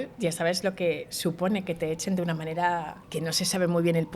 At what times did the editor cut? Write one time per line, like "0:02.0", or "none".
0:03.0